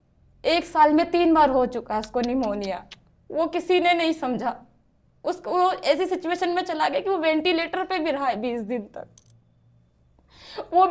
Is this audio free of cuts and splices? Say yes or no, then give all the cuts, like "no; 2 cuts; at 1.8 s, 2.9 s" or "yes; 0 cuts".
yes; 0 cuts